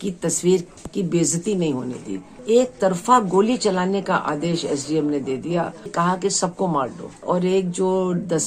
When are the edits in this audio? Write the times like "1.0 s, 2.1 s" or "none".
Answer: 2.4 s, 5.9 s, 7.2 s